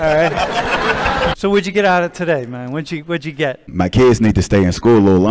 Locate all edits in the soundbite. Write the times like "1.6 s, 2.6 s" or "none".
1.3 s, 3.7 s